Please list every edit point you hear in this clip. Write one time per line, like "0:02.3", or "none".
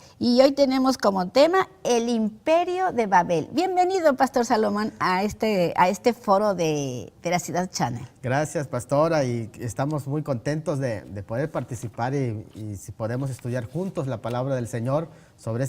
0:06.2